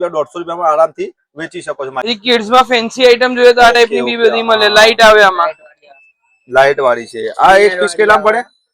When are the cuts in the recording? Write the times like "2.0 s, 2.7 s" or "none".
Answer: 2.0 s